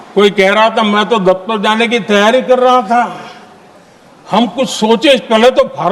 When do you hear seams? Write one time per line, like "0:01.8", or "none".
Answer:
none